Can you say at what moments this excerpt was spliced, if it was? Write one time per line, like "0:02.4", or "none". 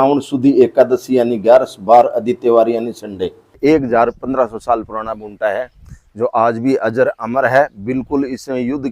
0:03.6